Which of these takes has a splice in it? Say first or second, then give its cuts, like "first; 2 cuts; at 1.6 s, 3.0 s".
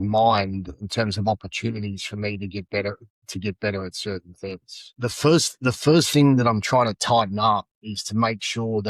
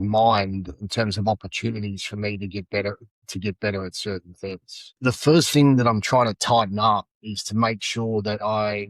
second; 1 cut; at 4.9 s